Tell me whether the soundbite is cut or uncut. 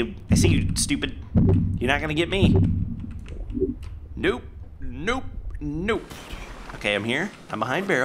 uncut